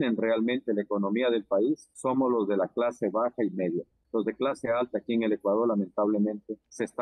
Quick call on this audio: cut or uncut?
uncut